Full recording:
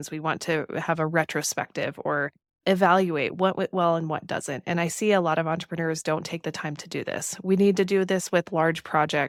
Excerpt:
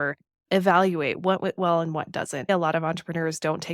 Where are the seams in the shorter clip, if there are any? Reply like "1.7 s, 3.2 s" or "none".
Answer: 2.5 s

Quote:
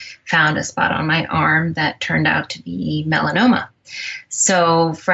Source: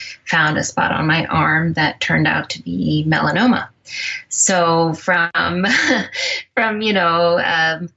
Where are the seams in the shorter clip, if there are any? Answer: none

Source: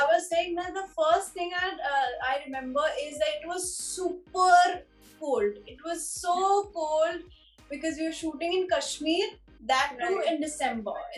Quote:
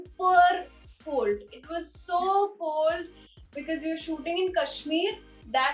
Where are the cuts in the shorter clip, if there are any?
none

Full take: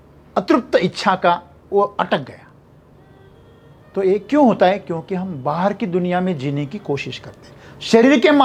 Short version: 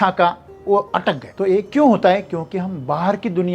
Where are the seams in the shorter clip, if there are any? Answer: 1.3 s

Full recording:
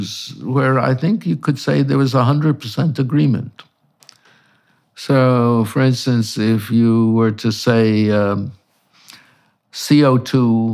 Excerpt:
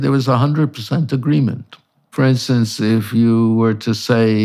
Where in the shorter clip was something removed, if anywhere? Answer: 2.1 s

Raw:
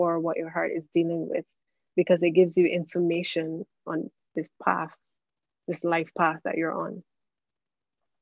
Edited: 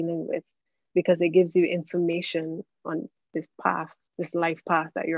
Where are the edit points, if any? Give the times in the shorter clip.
4.0 s

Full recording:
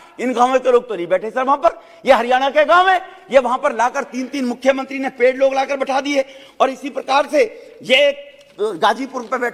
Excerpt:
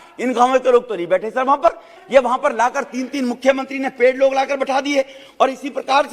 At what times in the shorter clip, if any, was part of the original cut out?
1.9 s

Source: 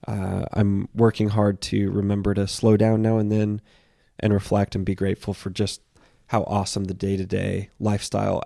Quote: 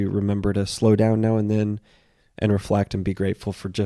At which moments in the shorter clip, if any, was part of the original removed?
none

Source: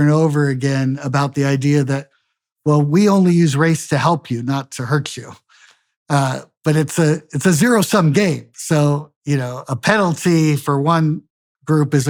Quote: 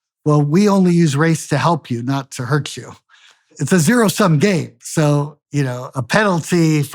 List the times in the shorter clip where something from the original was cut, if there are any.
3.6 s

